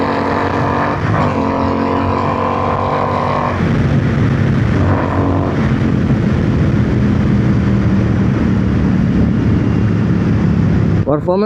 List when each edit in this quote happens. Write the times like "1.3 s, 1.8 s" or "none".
none